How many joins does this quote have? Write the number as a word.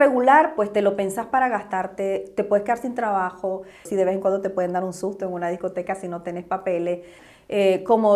two